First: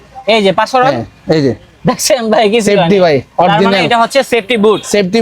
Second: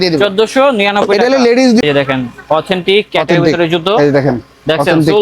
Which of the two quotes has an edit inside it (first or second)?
second